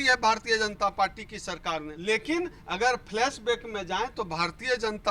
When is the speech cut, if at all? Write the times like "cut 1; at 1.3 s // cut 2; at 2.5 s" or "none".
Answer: cut 1; at 1.9 s